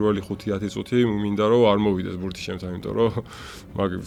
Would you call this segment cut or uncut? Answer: uncut